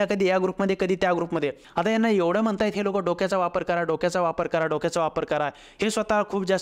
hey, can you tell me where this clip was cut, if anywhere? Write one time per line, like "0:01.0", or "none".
0:01.6

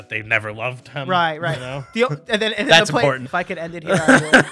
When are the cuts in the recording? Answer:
0:03.2

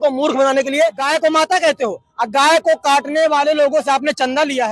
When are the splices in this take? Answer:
0:01.0

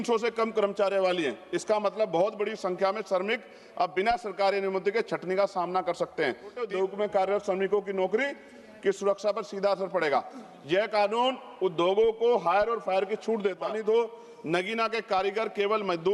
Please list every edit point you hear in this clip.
0:06.6
0:13.6

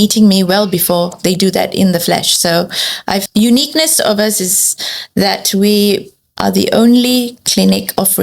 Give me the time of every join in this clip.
0:03.2

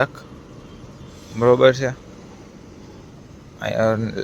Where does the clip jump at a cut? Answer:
none

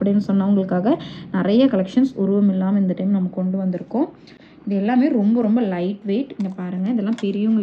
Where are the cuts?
none

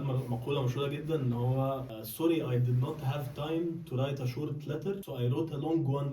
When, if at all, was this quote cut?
0:02.0
0:05.1

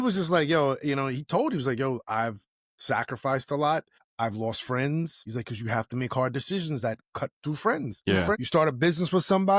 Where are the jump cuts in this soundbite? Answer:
0:04.0
0:05.3
0:08.2

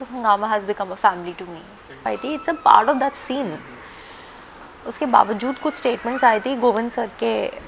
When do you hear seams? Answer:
0:02.1

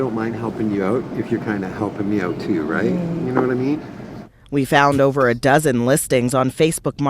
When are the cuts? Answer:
0:05.0

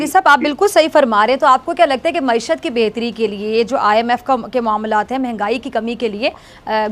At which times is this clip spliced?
none

